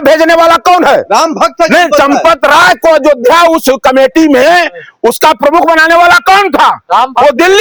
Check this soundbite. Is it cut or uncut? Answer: uncut